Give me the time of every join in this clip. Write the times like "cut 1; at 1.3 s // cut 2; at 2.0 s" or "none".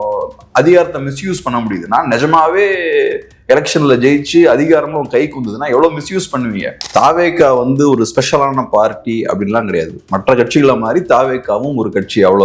cut 1; at 6.9 s